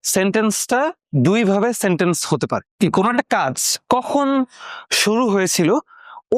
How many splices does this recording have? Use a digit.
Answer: 1